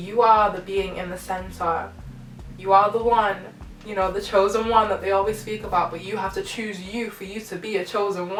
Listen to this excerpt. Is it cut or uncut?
uncut